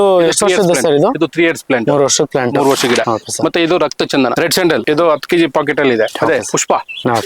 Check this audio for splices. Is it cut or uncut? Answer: cut